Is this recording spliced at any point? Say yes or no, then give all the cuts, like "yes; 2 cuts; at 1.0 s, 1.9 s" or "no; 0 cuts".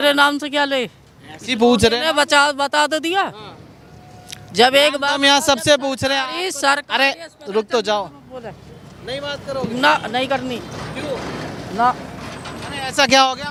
no; 0 cuts